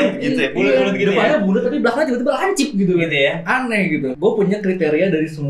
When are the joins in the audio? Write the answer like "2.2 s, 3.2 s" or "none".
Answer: 4.1 s